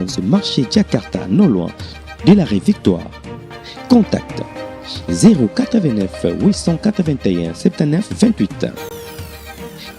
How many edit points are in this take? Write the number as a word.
zero